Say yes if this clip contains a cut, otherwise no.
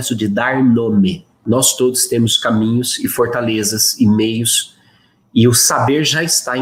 yes